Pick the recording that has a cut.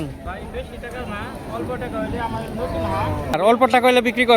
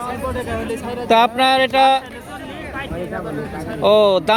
first; 1 cut; at 3.3 s

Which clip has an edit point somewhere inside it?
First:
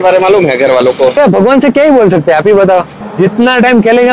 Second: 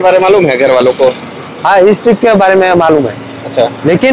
first; 2 cuts; at 1.1 s, 3.0 s

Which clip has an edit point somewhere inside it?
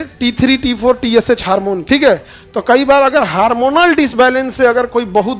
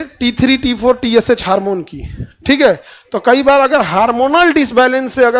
first; 1 cut; at 1.8 s

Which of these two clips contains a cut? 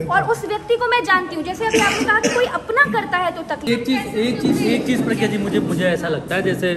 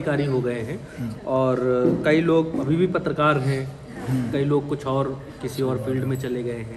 first; 1 cut; at 3.6 s

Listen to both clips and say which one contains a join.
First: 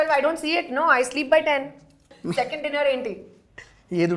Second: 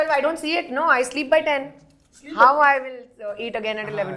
first; 1 cut; at 2.1 s

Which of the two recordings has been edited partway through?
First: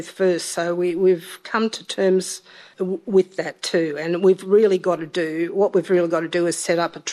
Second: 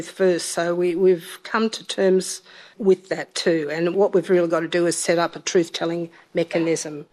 second; 2 cuts; at 2.7 s, 3.9 s

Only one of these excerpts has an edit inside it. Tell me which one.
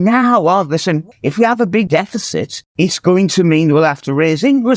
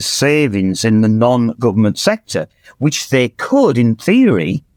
first; 2 cuts; at 1.1 s, 2.6 s

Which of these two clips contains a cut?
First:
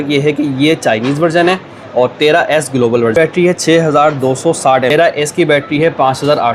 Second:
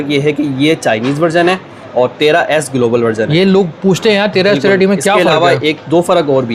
first; 2 cuts; at 3.1 s, 4.9 s

